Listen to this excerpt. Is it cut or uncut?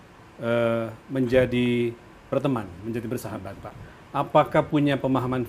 uncut